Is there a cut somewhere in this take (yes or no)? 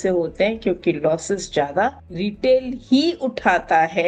no